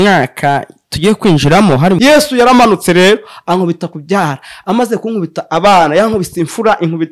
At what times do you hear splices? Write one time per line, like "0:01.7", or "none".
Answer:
0:02.0